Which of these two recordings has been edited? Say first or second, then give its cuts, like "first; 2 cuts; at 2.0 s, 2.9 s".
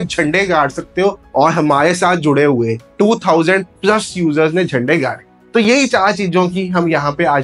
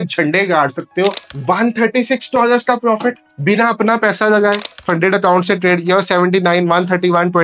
second; 2 cuts; at 1.2 s, 4.7 s